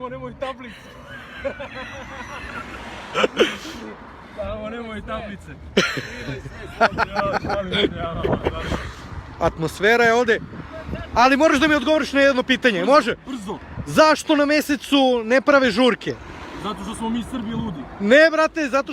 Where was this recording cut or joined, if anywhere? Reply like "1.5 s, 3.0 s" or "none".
none